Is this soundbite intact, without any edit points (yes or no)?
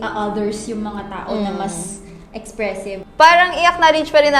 no